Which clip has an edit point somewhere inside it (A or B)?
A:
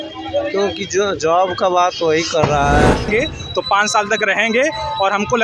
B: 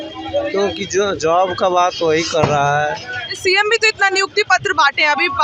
A